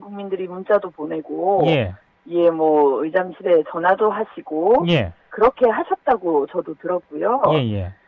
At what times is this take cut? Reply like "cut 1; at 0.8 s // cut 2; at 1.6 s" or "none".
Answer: none